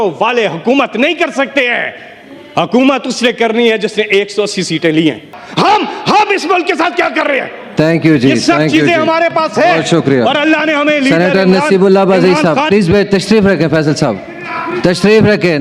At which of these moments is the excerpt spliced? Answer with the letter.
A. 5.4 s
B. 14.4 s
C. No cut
A